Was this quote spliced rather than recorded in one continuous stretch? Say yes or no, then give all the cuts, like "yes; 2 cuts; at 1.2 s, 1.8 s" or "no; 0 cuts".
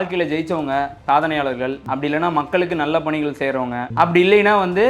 yes; 3 cuts; at 1.0 s, 1.8 s, 3.9 s